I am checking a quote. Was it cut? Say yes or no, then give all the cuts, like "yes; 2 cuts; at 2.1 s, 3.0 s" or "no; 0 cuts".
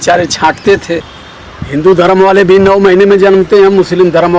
yes; 1 cut; at 1.1 s